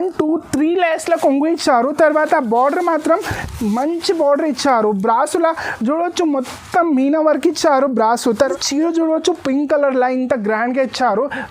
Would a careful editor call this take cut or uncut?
cut